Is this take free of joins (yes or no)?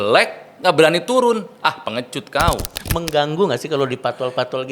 no